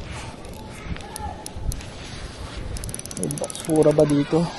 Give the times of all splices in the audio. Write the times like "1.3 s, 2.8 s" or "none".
none

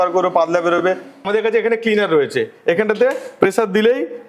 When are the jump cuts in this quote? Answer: 1.1 s

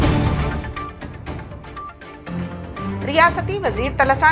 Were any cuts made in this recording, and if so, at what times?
2.9 s

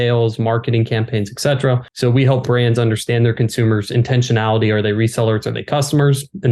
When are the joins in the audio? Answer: 1.9 s

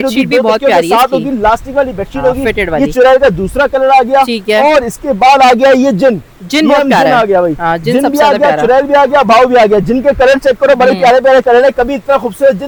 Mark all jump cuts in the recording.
none

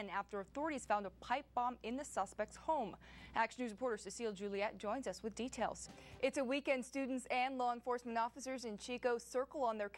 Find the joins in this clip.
5.9 s

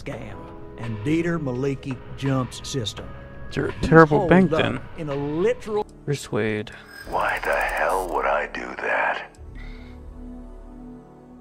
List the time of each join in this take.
5.8 s

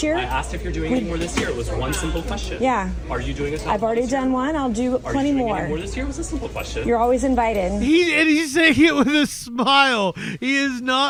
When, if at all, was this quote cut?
none

